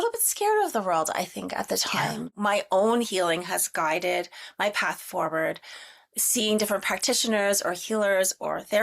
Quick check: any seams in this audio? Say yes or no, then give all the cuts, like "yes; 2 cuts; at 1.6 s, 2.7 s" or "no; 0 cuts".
yes; 1 cut; at 2.4 s